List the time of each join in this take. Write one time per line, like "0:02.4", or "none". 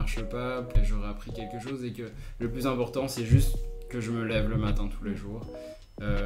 none